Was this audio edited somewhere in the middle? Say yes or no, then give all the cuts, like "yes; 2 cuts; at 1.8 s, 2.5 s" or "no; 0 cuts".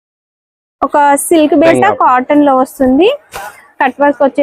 yes; 1 cut; at 1.7 s